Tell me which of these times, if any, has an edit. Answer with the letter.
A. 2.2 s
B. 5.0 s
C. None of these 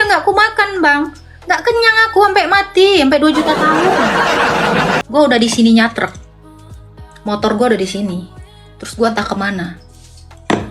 B